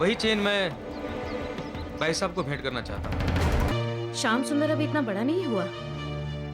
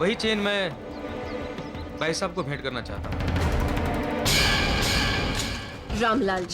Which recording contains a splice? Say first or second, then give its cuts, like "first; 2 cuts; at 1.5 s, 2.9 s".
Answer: first; 1 cut; at 3.7 s